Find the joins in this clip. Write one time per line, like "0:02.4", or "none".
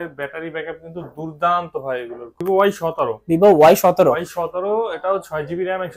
0:02.4